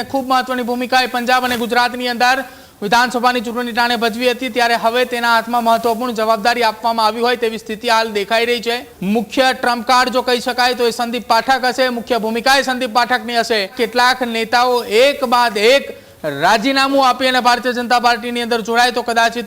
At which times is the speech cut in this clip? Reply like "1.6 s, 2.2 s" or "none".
8.9 s, 13.7 s